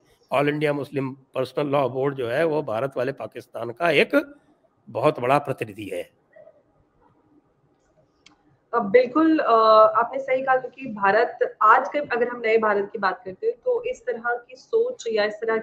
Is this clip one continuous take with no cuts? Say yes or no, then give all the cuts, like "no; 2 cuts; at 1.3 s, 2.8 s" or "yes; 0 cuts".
yes; 0 cuts